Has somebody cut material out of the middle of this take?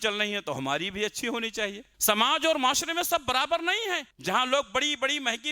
yes; 2 cuts; at 1.9 s, 4.1 s

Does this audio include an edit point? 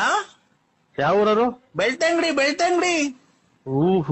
no; 0 cuts

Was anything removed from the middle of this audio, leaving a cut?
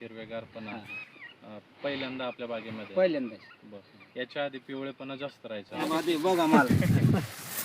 yes; 1 cut; at 5.8 s

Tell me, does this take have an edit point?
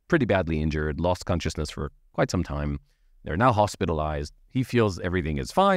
no; 0 cuts

